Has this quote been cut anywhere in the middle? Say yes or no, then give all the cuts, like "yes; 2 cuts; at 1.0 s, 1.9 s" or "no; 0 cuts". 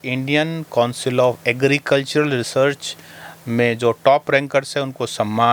no; 0 cuts